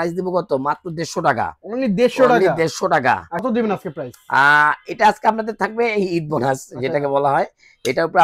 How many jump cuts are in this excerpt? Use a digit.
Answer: 1